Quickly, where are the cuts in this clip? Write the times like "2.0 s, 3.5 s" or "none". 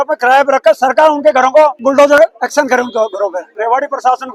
1.8 s, 3.5 s